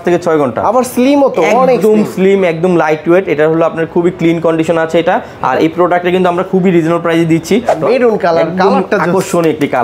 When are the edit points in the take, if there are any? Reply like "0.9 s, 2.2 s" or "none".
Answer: 7.8 s

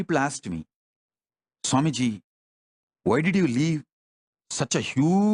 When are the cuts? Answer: none

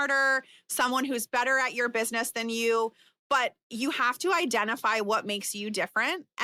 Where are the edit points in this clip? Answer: none

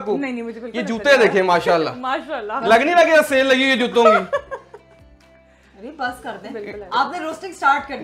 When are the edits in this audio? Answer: none

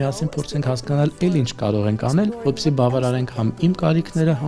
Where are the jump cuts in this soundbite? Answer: 2.4 s

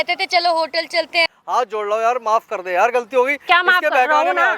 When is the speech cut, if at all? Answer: 1.3 s

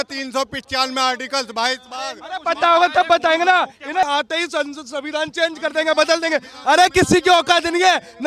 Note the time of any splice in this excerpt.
4.0 s

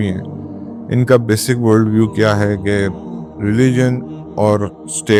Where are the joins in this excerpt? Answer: none

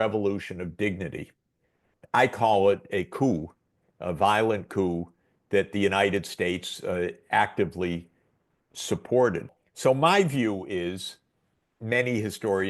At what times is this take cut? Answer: 9.6 s

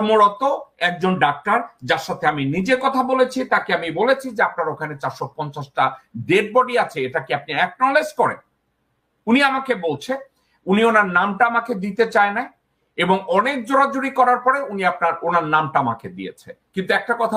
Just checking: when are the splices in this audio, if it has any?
none

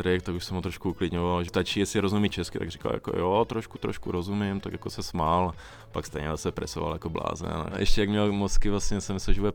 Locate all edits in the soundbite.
1.5 s, 7.8 s

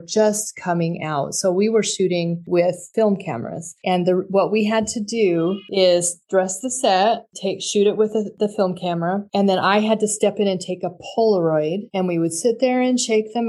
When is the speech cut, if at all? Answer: none

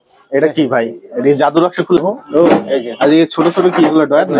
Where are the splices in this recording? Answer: 2.0 s

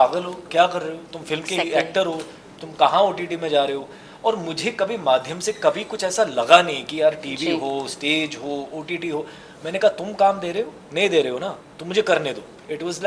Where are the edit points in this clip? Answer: none

